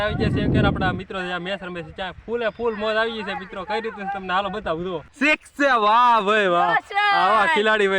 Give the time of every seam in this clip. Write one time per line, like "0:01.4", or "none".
0:05.1